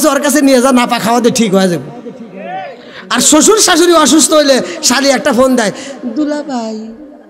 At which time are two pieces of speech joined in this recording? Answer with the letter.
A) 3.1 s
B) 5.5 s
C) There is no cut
C